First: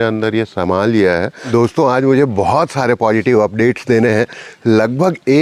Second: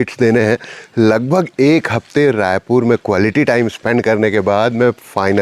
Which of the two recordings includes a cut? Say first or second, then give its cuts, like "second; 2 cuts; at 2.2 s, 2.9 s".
first; 1 cut; at 1.4 s